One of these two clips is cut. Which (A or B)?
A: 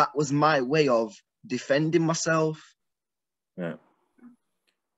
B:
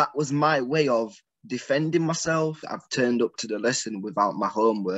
B